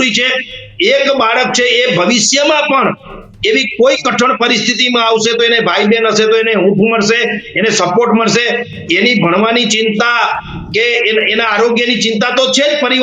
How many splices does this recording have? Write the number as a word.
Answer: zero